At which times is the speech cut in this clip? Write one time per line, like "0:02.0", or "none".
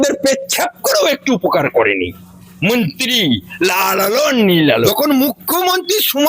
0:04.7